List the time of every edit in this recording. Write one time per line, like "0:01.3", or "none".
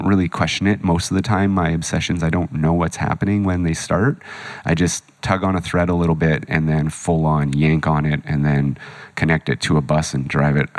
0:05.1

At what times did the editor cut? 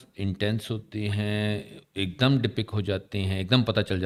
none

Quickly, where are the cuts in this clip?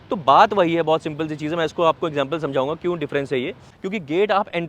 0:03.7

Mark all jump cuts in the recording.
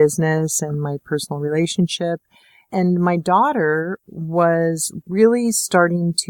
0:02.6

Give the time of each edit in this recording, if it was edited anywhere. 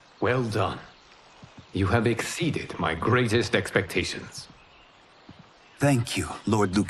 none

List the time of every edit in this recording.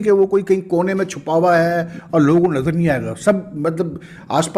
none

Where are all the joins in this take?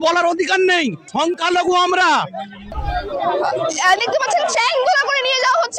0:01.0
0:02.6

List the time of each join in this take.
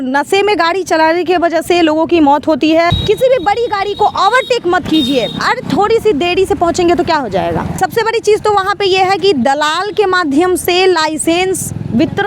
0:03.0
0:07.7

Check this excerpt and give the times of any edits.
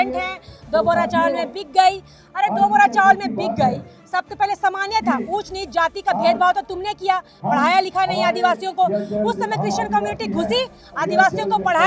none

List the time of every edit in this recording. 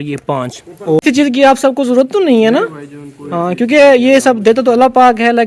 0:01.0

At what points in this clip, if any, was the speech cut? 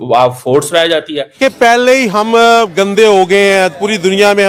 0:01.4

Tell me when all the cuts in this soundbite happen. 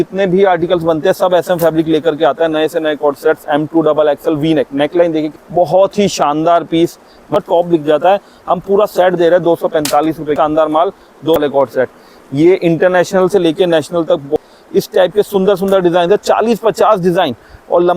0:05.4
0:07.4
0:10.3
0:11.4
0:14.4

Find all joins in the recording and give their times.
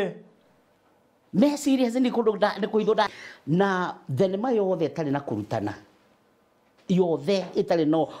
0:03.1

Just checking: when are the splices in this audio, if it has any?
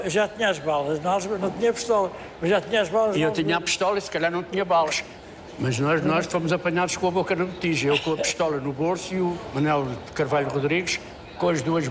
0:04.9
0:09.4

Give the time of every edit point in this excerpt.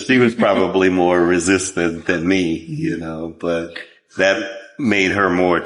none

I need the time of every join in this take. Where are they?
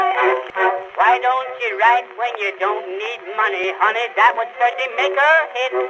0:03.6

